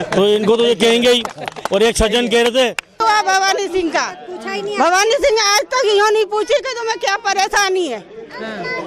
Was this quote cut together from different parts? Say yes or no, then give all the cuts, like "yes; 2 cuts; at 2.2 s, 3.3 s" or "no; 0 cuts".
yes; 1 cut; at 3.0 s